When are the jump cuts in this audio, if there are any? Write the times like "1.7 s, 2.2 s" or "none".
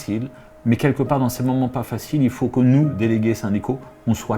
2.9 s